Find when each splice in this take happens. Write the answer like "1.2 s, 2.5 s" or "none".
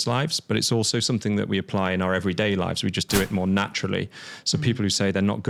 none